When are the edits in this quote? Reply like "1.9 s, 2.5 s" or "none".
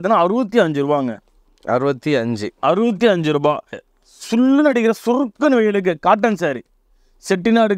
3.7 s